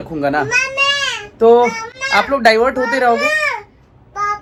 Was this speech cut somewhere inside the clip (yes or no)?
no